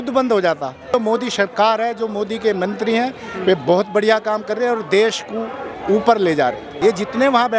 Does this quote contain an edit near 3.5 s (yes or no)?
no